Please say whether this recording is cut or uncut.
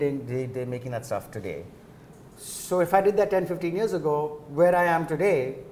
uncut